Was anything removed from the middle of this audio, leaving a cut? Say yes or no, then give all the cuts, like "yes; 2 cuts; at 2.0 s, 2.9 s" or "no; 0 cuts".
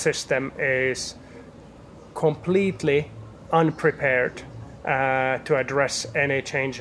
no; 0 cuts